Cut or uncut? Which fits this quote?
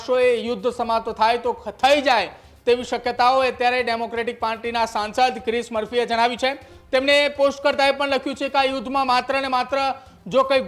uncut